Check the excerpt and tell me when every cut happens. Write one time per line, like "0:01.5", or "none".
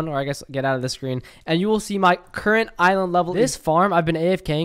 0:03.3